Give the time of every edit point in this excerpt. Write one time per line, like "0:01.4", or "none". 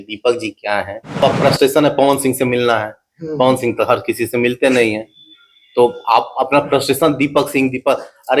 0:01.2